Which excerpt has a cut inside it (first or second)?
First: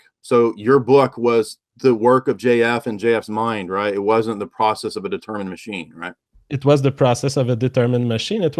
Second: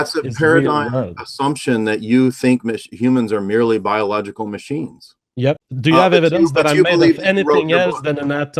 second